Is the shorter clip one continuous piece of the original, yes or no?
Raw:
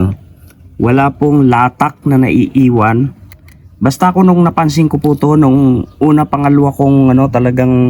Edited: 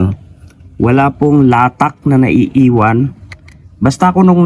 yes